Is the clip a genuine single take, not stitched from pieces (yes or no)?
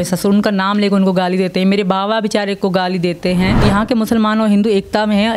no